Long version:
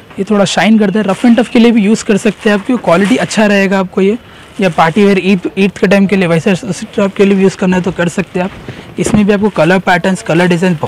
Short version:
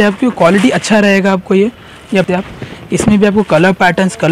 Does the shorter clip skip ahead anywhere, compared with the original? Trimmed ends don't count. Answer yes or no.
yes